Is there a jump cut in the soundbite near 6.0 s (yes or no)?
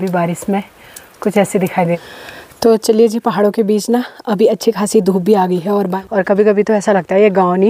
yes